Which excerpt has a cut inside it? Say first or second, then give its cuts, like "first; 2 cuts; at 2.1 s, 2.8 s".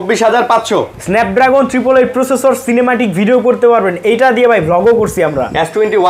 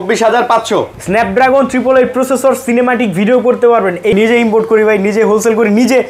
second; 1 cut; at 4.1 s